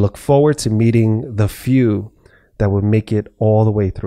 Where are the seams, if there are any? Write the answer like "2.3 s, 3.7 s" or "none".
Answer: none